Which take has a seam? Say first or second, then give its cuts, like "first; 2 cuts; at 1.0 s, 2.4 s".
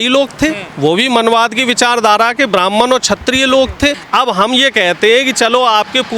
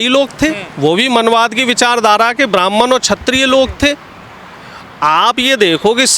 first; 1 cut; at 4.0 s